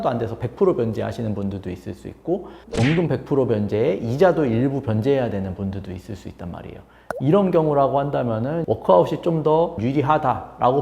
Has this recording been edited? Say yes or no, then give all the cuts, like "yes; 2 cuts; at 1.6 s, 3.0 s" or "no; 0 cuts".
yes; 2 cuts; at 8.6 s, 9.8 s